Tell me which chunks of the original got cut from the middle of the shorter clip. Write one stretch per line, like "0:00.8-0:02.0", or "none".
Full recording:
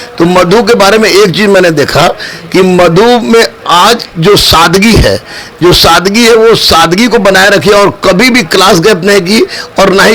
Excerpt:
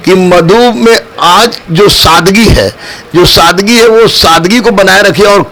none